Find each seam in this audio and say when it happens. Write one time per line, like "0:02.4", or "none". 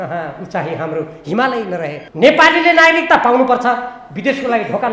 0:02.0